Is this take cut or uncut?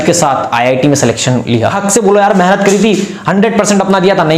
cut